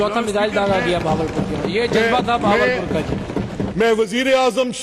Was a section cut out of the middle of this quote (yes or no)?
yes